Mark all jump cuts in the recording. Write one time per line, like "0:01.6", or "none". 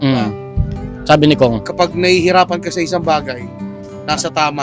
none